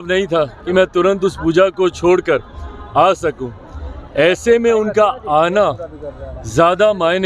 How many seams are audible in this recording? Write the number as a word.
zero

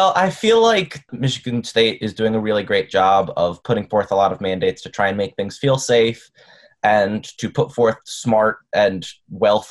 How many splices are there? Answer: one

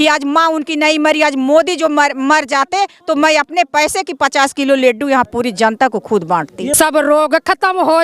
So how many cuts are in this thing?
one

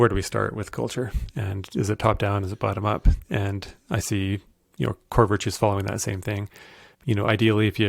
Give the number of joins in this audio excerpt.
zero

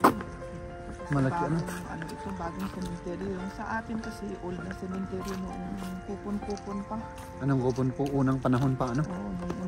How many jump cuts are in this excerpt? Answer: zero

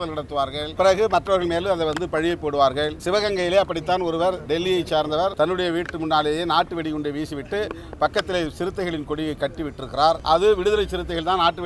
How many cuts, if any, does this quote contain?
five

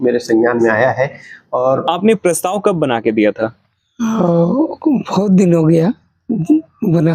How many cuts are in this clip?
one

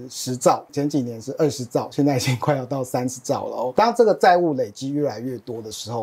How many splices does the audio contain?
one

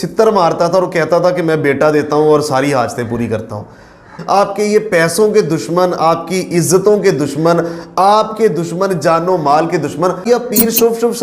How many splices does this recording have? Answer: two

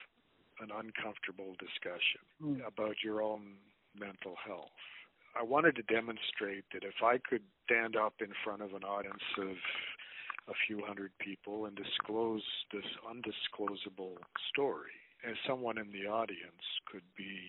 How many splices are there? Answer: two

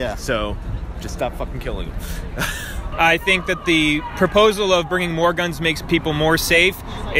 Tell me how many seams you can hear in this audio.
one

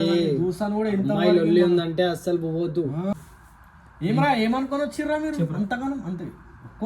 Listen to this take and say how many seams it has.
one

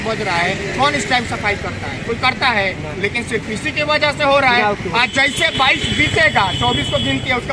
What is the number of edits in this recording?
zero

